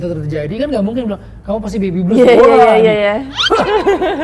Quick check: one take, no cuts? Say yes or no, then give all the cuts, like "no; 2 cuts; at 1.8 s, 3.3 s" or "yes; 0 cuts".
yes; 0 cuts